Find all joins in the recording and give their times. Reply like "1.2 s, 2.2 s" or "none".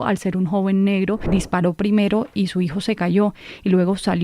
1.2 s